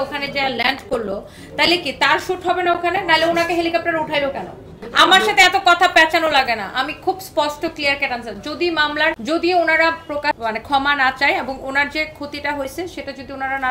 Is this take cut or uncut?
cut